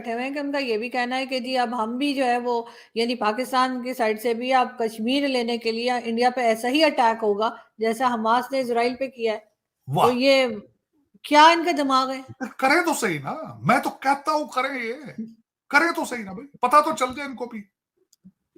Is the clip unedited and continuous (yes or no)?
yes